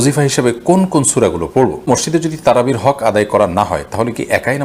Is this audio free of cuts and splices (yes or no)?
no